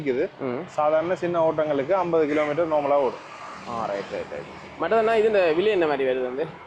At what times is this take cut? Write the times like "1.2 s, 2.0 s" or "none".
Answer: none

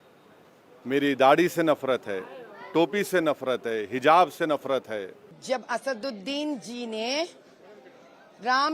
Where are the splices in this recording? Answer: 5.3 s

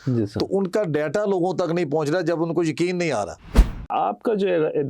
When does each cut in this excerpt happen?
3.9 s

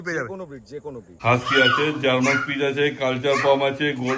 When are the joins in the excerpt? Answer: 1.1 s

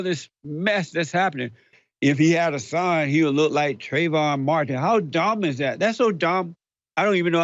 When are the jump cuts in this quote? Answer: 1.7 s

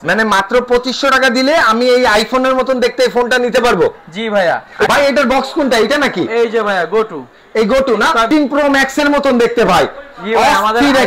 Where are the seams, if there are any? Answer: 4.9 s, 8.3 s

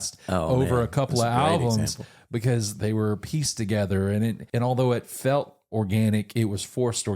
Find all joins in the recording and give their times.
2.7 s, 4.4 s

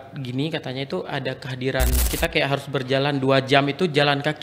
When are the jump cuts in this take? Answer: 2.0 s

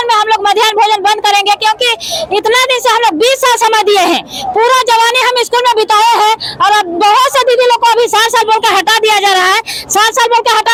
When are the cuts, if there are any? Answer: none

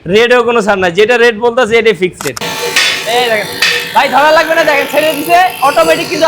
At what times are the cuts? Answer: 2.4 s

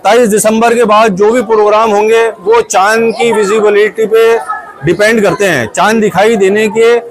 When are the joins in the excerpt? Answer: none

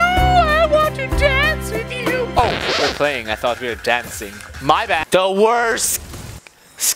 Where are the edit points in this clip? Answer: 5.0 s

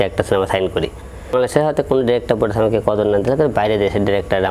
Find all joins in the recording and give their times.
1.3 s

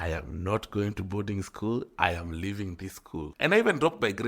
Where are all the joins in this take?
3.3 s

